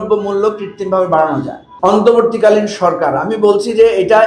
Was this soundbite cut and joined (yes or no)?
yes